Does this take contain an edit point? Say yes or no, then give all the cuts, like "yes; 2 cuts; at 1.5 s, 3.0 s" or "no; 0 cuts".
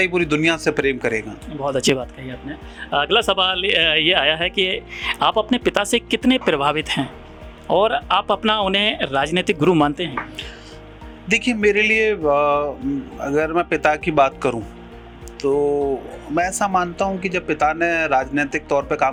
no; 0 cuts